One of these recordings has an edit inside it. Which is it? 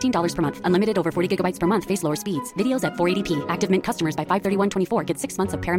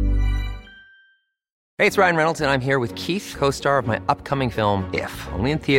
second; 1 cut; at 1.6 s

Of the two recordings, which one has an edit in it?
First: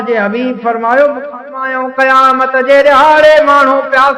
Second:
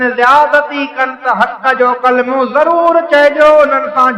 first; 1 cut; at 1.6 s

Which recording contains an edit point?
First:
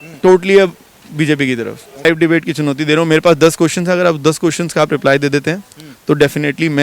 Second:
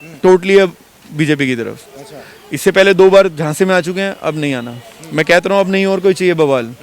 first; 1 cut; at 2.0 s

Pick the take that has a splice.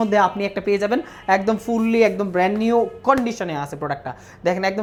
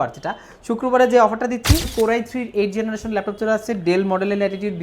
second; 1 cut; at 1.9 s

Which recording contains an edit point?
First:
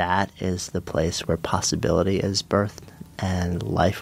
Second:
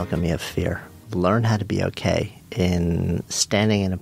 second; 2 cuts; at 1.0 s, 2.4 s

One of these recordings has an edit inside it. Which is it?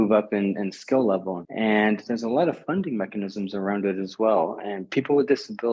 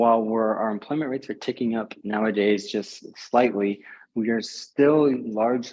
first; 1 cut; at 1.4 s

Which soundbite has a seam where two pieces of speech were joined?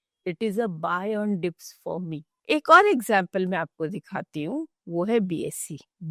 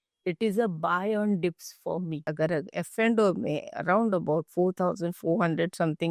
second; 1 cut; at 2.3 s

